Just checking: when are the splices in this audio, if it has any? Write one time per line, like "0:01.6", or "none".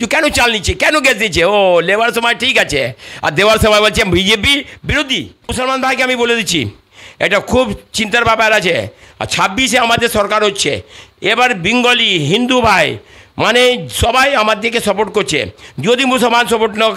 0:05.5